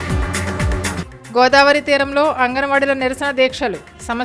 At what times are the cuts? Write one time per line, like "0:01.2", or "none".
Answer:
none